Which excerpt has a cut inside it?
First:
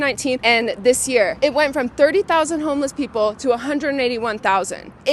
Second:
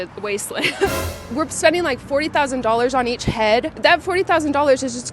second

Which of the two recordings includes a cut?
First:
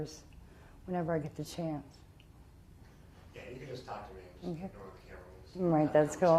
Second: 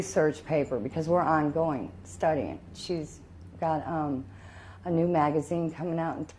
first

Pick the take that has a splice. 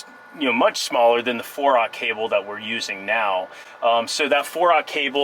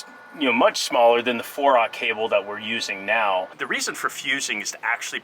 second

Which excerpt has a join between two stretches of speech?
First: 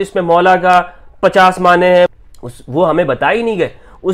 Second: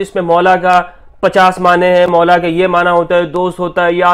first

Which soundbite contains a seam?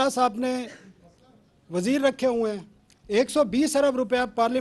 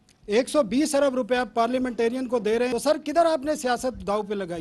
second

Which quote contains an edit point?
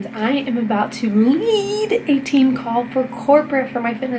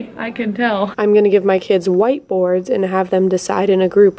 second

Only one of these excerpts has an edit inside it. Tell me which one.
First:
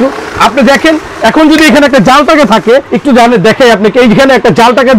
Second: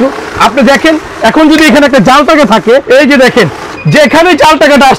second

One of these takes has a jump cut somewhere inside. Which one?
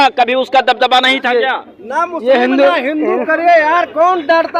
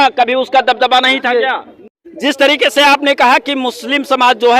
second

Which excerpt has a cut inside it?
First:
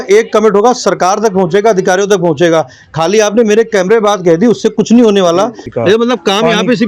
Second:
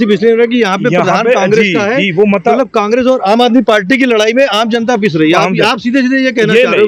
first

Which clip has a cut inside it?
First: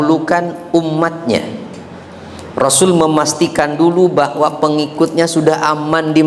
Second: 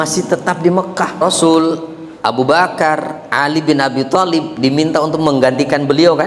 second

